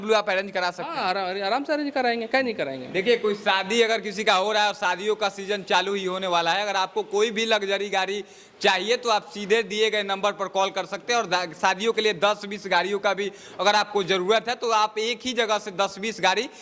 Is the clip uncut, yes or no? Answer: yes